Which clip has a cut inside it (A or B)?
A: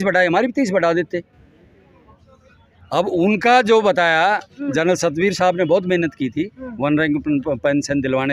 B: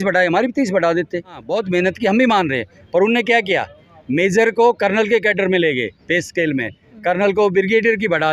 B